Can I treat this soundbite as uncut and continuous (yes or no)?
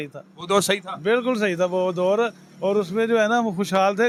yes